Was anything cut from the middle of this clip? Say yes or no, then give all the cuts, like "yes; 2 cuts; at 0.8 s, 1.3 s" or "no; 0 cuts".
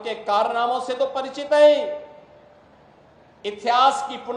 no; 0 cuts